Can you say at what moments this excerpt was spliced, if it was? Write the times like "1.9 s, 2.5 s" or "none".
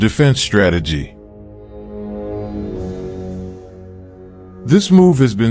1.2 s, 4.6 s